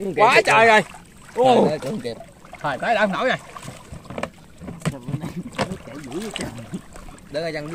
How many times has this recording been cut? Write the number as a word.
zero